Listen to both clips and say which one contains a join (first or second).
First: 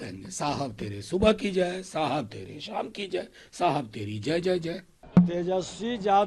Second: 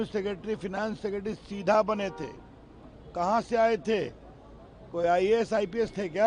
first